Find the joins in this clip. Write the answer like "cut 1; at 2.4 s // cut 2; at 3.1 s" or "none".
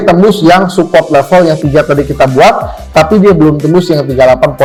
none

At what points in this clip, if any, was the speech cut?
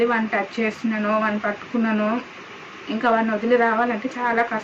none

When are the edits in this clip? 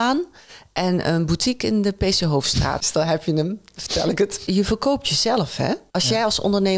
cut 1; at 2.8 s // cut 2; at 4.4 s // cut 3; at 5.8 s

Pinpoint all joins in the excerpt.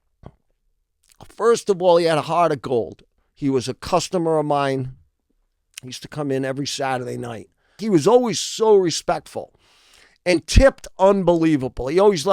cut 1; at 7.8 s

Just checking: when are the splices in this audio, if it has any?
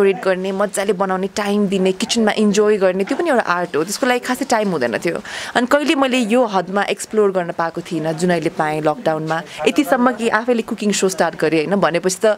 none

